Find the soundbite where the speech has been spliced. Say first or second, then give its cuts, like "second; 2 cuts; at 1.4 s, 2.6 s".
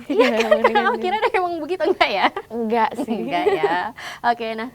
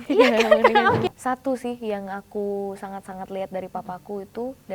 second; 1 cut; at 1.1 s